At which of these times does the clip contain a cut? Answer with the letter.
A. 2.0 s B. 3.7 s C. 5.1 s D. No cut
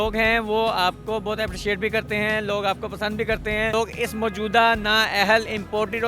B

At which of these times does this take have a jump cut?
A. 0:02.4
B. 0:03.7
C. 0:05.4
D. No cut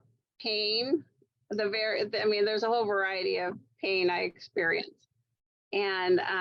D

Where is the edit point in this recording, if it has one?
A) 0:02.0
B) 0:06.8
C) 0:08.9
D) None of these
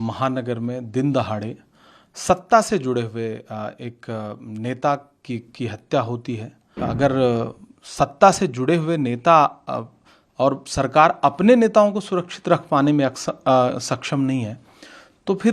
B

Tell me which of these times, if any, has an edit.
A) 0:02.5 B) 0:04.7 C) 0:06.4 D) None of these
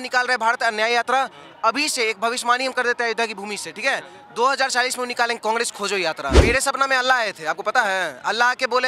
C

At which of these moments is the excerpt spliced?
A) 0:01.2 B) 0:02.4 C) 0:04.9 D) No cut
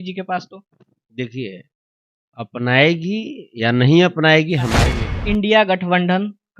C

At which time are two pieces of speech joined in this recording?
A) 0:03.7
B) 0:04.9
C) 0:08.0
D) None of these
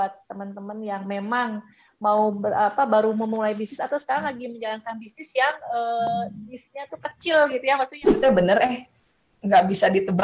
C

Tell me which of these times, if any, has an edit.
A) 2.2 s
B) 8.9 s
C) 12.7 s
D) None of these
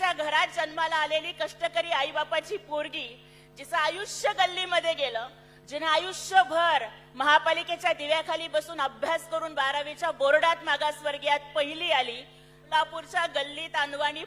C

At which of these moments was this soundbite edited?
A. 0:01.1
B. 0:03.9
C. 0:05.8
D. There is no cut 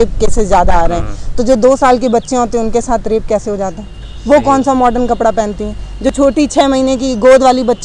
D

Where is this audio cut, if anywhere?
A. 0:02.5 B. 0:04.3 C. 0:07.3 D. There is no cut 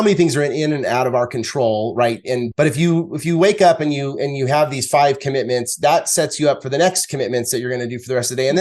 A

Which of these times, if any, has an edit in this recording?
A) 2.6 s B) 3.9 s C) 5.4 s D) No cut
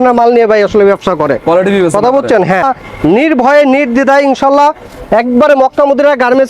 A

